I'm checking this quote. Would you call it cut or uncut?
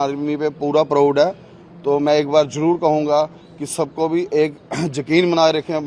uncut